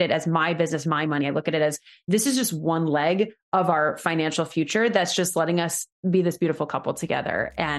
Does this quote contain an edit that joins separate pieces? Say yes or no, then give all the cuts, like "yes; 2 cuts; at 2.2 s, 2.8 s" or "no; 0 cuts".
no; 0 cuts